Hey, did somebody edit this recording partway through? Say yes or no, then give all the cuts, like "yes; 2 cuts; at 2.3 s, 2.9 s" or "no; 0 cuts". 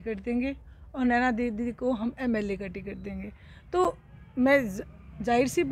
no; 0 cuts